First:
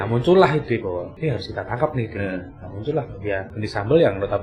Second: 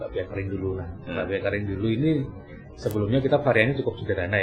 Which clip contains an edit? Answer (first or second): first